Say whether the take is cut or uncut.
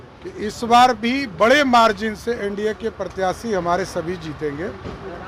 uncut